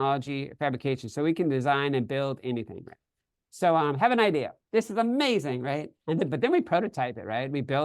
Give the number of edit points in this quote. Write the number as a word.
zero